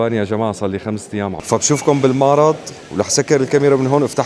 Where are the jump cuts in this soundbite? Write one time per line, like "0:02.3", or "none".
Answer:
0:01.4